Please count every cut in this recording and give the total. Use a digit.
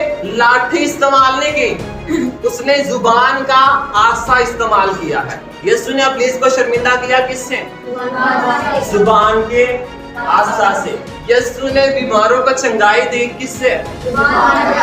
1